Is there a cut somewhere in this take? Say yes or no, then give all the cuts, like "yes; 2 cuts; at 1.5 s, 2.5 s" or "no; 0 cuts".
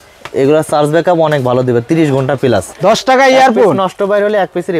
yes; 1 cut; at 2.7 s